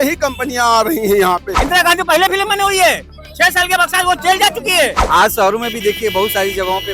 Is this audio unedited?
no; 2 cuts; at 1.5 s, 5.0 s

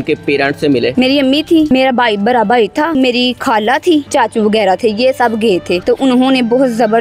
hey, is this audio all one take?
no; 5 cuts; at 0.9 s, 1.7 s, 2.9 s, 4.1 s, 5.8 s

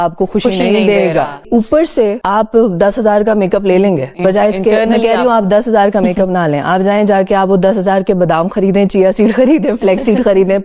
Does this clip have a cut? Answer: yes; 1 cut; at 1.5 s

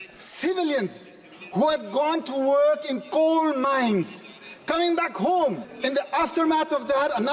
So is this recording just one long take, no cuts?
no; 1 cut; at 5.7 s

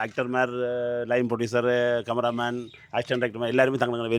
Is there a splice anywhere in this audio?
no; 0 cuts

